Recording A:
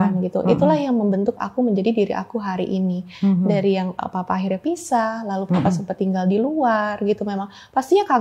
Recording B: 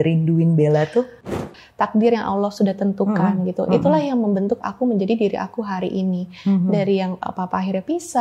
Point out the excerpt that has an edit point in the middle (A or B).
B